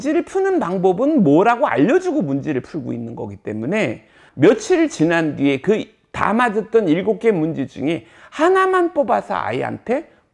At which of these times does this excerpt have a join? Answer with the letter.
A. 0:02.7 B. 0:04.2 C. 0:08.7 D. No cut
B